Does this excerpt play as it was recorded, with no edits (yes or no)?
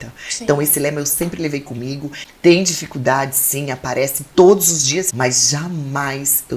no